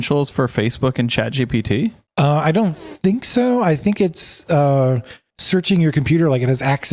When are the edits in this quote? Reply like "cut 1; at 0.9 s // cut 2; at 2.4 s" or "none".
none